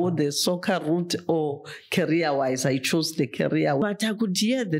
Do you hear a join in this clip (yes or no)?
yes